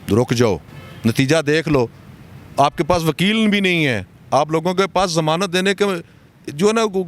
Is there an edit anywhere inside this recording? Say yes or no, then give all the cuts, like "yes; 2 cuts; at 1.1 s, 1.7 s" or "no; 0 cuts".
no; 0 cuts